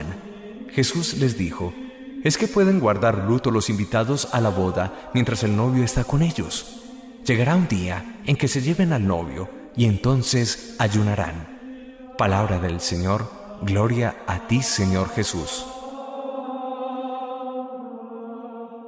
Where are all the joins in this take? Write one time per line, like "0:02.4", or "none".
none